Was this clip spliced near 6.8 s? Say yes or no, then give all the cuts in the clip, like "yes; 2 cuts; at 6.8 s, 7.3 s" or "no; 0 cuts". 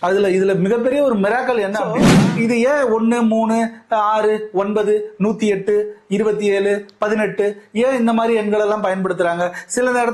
no; 1 cut; at 1.9 s